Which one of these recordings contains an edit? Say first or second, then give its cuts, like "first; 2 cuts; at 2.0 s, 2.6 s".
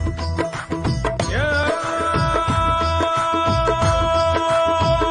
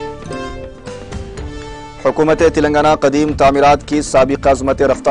second; 1 cut; at 1.2 s